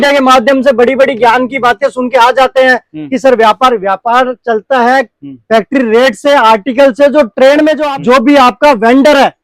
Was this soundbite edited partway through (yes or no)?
yes